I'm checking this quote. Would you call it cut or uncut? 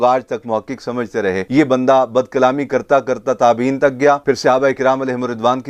uncut